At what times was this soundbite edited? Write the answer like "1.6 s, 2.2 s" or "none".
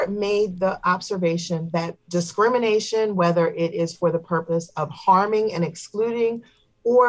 none